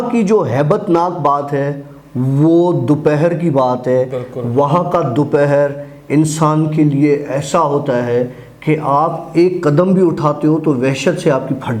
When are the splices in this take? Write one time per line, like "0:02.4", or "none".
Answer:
none